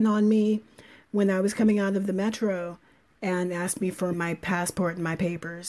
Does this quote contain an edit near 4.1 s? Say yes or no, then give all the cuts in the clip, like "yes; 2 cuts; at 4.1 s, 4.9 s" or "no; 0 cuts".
yes; 1 cut; at 4.1 s